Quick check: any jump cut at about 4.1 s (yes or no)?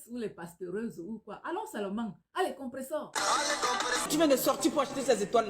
yes